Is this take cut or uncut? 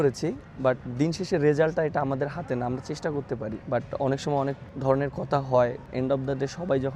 cut